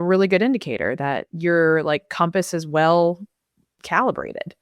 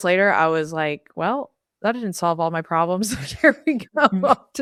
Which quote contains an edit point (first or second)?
first